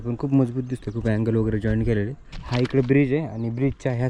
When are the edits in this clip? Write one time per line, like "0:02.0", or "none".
0:02.4